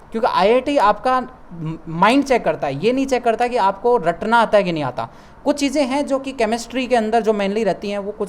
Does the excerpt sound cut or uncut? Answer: uncut